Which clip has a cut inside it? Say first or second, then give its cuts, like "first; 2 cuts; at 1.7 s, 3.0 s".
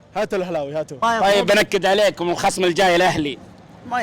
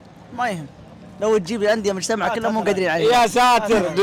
first; 1 cut; at 1.0 s